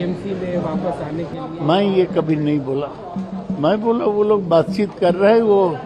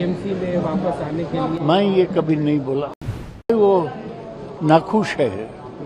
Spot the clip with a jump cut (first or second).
second